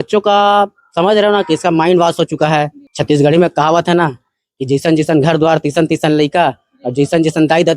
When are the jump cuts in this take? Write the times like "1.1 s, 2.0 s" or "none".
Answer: 2.9 s